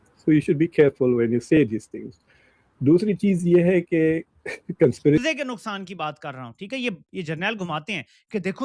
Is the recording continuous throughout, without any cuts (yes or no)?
no